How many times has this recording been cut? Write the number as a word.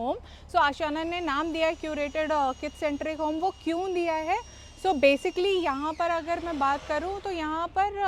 zero